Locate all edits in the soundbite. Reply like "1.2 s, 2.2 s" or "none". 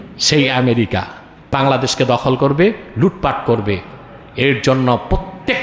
1.5 s